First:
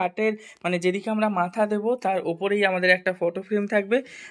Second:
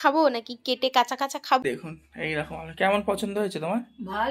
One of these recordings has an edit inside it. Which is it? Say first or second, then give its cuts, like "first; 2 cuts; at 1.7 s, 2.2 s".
second; 1 cut; at 1.6 s